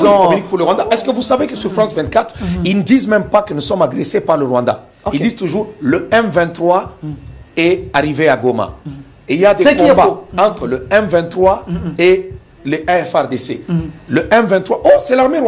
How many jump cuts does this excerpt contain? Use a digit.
0